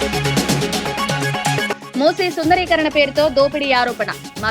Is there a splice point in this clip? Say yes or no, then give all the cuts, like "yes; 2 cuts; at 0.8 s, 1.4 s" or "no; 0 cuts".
yes; 1 cut; at 1.3 s